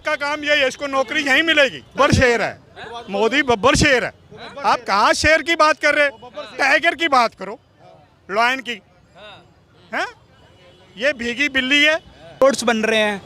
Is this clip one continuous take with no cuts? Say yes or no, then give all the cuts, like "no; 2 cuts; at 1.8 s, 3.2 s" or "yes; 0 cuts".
no; 2 cuts; at 1.9 s, 12.4 s